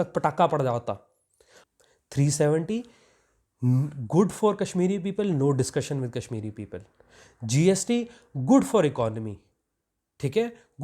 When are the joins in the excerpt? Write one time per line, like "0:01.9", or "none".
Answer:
0:01.5